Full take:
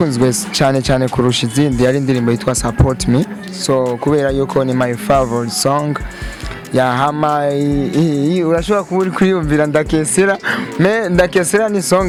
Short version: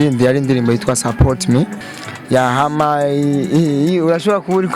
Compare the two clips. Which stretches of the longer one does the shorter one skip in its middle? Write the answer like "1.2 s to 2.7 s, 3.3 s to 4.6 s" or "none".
3.5 s to 6.3 s